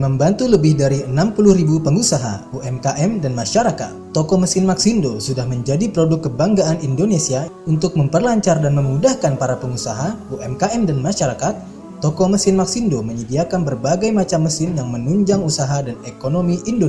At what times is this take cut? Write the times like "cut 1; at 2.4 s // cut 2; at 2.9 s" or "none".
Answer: none

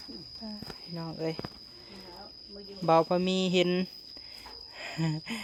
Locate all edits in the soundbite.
none

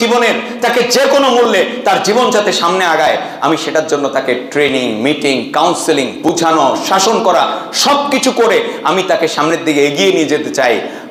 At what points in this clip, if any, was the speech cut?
none

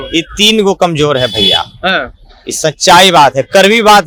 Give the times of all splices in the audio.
none

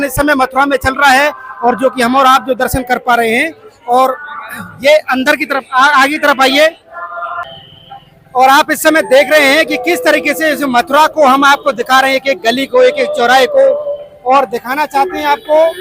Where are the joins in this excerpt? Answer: cut 1; at 7.4 s

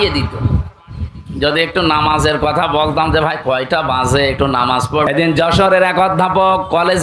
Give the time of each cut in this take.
cut 1; at 5.1 s

